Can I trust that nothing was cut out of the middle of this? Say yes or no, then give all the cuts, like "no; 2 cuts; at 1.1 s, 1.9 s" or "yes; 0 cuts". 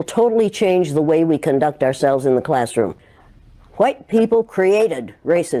no; 1 cut; at 3.0 s